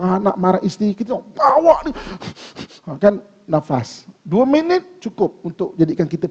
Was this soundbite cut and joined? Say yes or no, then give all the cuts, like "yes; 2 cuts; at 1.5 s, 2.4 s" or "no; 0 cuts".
no; 0 cuts